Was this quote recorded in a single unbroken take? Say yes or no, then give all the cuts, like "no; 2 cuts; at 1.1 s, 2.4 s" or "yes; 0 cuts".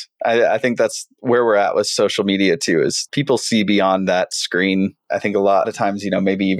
yes; 0 cuts